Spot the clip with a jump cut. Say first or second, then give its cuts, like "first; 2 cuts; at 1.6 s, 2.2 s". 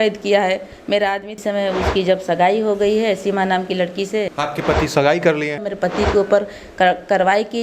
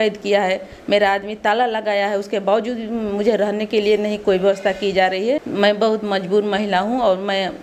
first; 3 cuts; at 1.4 s, 4.3 s, 5.6 s